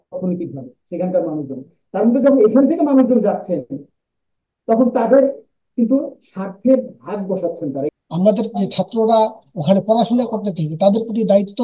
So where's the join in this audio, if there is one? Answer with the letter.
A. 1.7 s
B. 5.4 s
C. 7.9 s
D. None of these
C